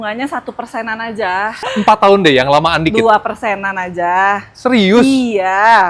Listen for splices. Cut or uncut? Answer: cut